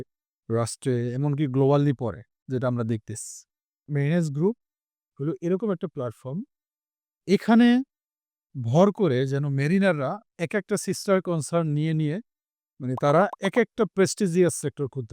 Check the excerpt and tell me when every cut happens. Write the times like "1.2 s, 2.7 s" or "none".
3.9 s